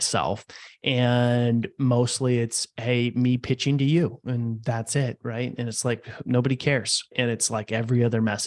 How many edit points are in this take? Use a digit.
1